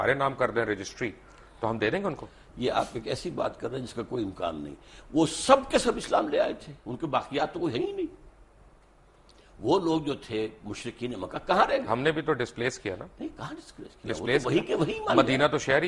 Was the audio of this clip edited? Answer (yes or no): no